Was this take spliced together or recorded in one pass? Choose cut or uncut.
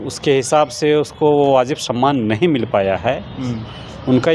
uncut